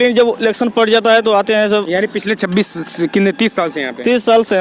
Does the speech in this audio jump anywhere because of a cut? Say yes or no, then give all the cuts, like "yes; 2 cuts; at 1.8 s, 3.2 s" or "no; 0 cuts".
no; 0 cuts